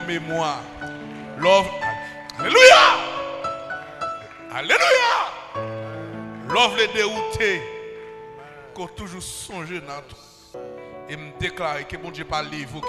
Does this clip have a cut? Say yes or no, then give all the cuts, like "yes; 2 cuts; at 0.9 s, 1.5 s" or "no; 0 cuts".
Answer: yes; 1 cut; at 10.5 s